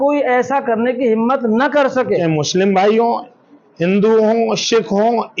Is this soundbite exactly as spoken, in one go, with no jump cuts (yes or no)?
no